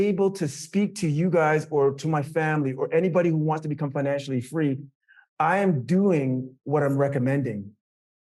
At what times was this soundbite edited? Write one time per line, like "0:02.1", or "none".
none